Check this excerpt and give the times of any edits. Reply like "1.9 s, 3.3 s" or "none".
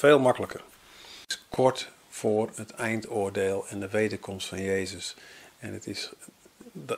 1.4 s